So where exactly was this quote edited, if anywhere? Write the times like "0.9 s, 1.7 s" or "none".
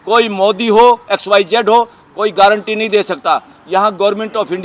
none